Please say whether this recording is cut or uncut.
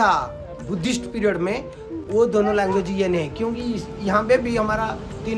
uncut